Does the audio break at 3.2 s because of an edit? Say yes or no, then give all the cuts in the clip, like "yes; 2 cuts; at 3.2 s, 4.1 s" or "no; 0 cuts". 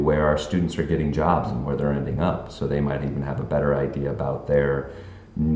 no; 0 cuts